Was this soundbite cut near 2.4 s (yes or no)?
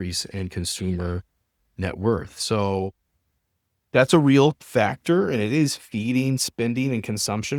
no